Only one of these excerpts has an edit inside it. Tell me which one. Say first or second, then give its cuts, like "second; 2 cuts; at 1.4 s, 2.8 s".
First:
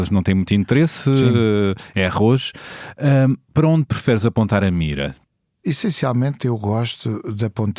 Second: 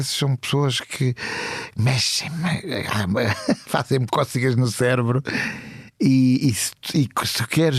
first; 1 cut; at 5.3 s